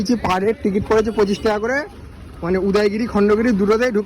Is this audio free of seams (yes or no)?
yes